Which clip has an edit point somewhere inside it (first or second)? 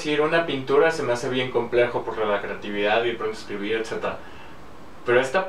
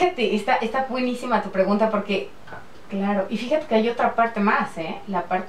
second